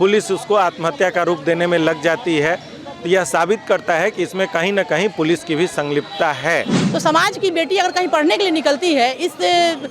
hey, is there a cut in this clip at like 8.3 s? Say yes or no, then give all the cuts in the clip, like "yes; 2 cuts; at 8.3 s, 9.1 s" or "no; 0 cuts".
no; 1 cut; at 6.8 s